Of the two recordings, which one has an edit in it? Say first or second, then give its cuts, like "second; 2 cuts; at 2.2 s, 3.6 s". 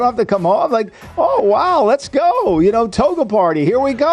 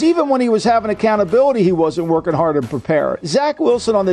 second; 1 cut; at 3.2 s